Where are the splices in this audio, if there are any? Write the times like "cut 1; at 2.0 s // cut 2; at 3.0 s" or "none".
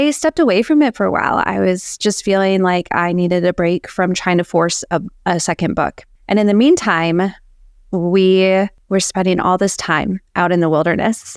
cut 1; at 6.1 s // cut 2; at 8.8 s